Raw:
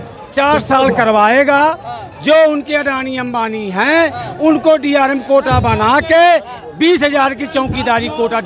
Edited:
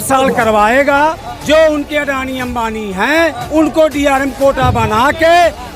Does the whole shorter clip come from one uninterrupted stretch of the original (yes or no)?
no